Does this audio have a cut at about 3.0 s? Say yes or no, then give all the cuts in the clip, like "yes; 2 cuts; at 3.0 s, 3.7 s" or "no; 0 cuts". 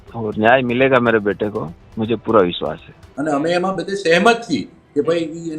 yes; 1 cut; at 3.0 s